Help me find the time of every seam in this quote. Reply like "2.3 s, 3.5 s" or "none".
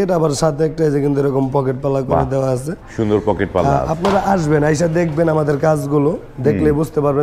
none